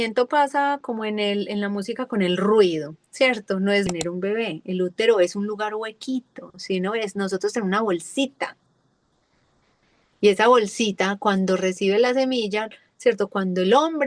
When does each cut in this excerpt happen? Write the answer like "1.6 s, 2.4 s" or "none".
3.9 s